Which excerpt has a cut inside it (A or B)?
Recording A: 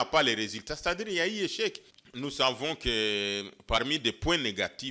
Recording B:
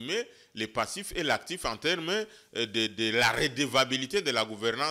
A